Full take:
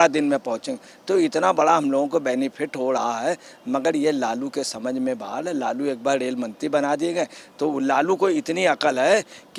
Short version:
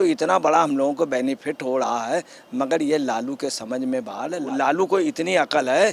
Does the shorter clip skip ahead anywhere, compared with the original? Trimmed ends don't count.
yes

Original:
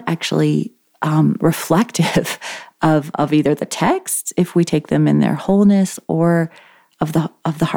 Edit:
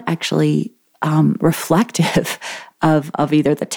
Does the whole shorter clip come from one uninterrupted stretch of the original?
yes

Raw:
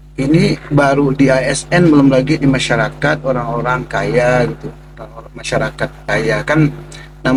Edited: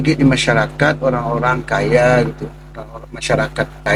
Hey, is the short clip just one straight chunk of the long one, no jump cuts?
yes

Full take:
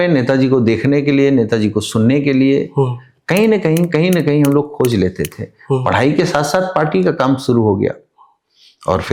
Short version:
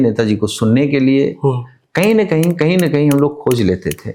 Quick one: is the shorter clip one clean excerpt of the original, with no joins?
yes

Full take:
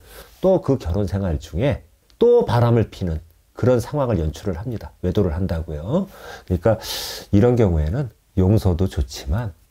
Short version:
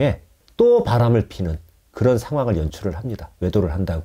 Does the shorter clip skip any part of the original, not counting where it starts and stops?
no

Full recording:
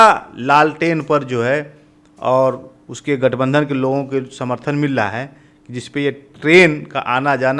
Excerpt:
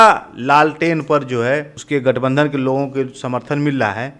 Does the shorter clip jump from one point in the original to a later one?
yes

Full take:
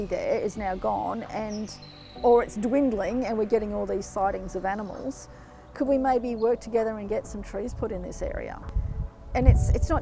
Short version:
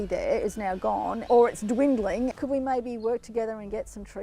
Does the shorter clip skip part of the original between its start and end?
yes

